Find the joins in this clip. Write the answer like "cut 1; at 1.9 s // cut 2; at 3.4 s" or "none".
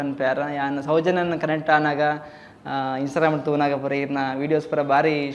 none